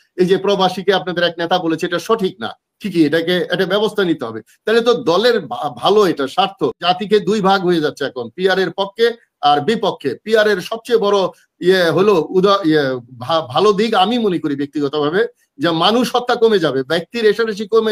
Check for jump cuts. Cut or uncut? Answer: cut